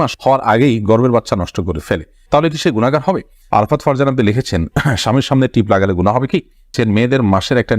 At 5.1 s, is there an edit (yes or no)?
no